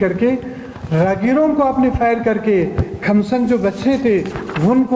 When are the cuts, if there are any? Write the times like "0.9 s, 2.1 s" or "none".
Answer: none